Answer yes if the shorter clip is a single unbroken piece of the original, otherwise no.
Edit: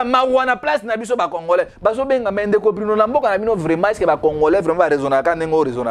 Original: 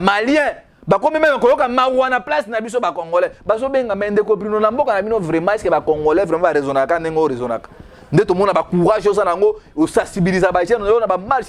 yes